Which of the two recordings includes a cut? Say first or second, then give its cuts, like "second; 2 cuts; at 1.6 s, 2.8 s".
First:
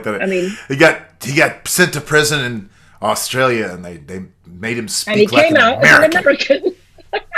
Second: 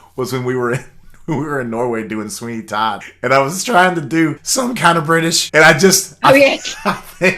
second; 3 cuts; at 3.1 s, 4.4 s, 5.4 s